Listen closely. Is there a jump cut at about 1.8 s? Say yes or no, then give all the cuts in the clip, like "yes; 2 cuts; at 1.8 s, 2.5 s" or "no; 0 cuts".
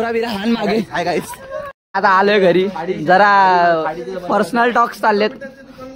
yes; 1 cut; at 1.8 s